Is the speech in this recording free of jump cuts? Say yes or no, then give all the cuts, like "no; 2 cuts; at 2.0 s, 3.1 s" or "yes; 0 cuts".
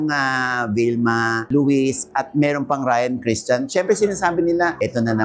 yes; 0 cuts